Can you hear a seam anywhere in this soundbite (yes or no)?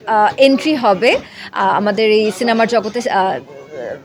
no